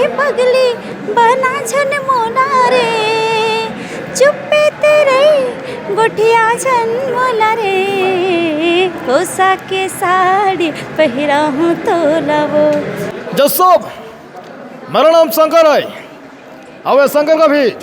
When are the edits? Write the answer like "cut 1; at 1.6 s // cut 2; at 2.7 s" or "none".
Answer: cut 1; at 13.0 s